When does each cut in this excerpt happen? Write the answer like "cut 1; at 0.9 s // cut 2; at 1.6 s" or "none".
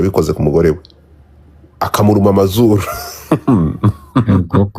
cut 1; at 1.9 s